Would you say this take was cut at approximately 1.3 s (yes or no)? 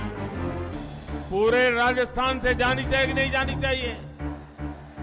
yes